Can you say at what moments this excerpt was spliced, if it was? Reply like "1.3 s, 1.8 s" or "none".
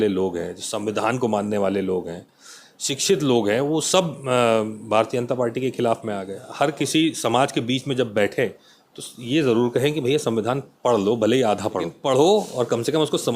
6.4 s, 11.9 s